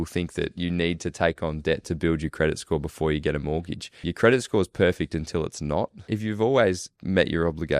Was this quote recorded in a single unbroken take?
no; 3 cuts; at 4.0 s, 6.0 s, 6.9 s

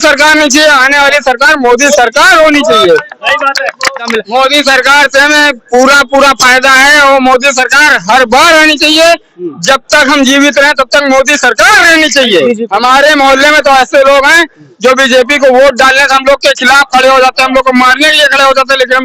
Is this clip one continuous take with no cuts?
no; 2 cuts; at 4.0 s, 12.5 s

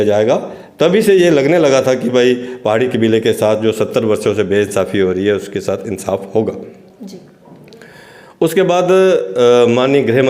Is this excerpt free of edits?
yes; 0 cuts

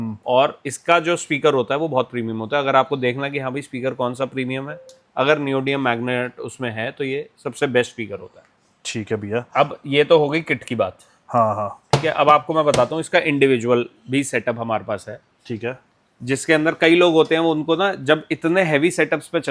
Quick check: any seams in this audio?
no; 0 cuts

